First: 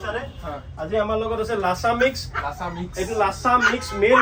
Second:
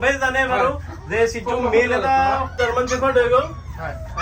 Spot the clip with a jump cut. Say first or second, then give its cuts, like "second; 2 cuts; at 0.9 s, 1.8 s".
second; 1 cut; at 2.5 s